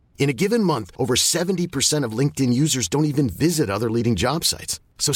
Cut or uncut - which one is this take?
uncut